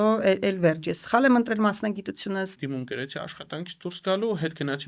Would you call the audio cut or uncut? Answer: cut